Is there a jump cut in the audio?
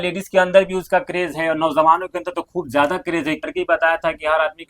yes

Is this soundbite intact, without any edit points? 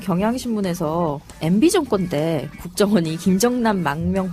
no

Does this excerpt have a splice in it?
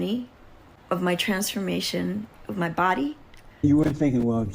yes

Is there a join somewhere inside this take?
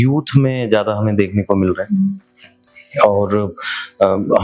no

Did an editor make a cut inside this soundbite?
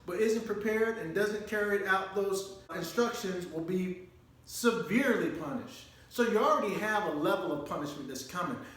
yes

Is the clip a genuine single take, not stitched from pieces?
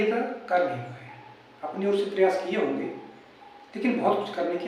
yes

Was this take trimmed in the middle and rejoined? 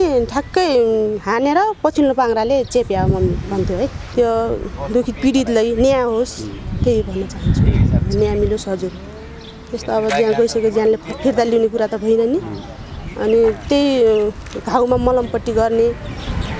yes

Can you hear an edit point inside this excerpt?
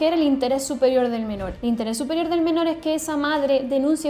yes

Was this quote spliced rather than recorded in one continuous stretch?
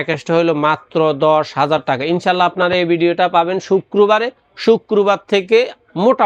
no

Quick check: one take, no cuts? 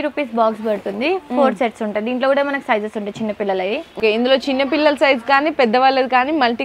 no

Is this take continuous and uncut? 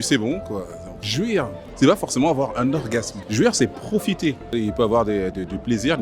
no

